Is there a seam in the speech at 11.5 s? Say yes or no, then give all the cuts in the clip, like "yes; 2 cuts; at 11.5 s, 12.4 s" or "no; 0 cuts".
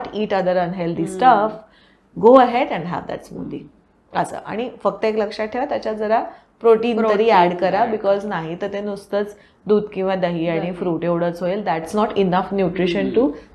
no; 0 cuts